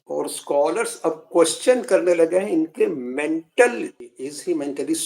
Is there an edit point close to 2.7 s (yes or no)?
no